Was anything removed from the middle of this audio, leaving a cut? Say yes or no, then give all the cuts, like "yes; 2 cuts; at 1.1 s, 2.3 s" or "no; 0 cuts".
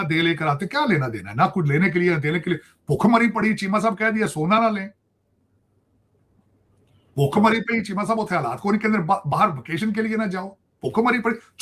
no; 0 cuts